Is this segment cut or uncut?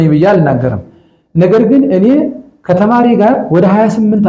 uncut